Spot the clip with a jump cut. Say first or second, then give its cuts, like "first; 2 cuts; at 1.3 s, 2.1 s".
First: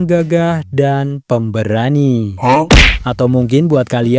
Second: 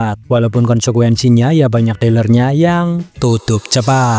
first; 1 cut; at 2.7 s